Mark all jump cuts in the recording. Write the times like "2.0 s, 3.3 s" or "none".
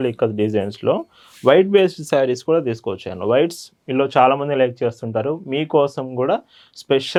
none